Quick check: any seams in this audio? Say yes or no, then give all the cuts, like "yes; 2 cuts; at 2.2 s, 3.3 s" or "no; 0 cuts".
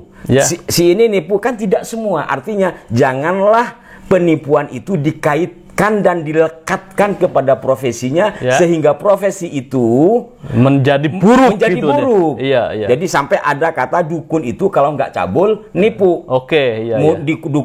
no; 0 cuts